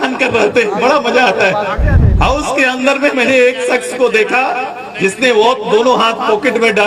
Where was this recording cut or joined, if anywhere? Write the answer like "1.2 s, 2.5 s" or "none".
none